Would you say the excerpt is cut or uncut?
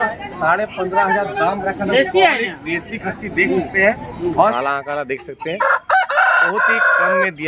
cut